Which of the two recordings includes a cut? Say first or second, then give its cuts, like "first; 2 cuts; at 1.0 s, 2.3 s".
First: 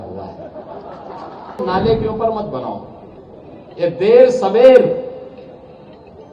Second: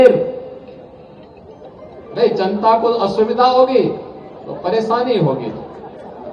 first; 1 cut; at 1.6 s